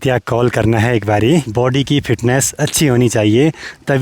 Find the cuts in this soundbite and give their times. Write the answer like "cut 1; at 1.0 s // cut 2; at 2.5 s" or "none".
cut 1; at 1.5 s